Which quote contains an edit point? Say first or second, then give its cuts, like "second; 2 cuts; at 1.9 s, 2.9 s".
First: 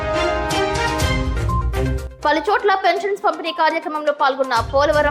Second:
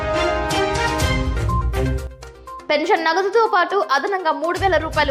first; 1 cut; at 2.0 s